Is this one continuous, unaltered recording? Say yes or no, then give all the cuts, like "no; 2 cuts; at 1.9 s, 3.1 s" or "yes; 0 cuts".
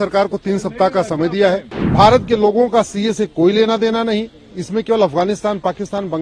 no; 1 cut; at 1.8 s